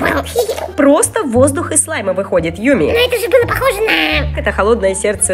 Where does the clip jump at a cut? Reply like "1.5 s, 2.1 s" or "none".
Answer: 2.9 s, 4.3 s